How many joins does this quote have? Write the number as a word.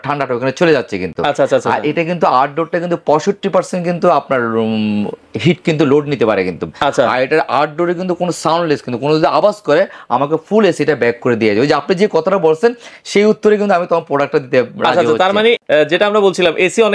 zero